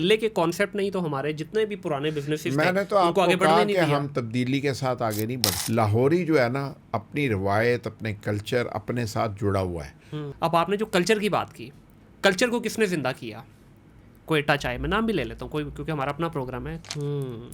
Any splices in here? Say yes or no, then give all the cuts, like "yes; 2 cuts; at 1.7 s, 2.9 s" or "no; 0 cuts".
yes; 3 cuts; at 5.5 s, 10.3 s, 16.7 s